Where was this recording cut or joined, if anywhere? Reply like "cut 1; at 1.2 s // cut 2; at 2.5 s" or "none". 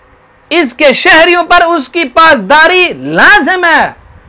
none